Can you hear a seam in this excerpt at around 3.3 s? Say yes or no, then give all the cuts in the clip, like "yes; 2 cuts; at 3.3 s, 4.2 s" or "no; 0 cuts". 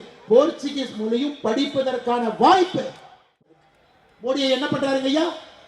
yes; 1 cut; at 3.3 s